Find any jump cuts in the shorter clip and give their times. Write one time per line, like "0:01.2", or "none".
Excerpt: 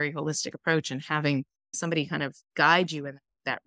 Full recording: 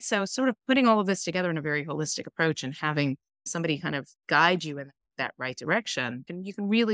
none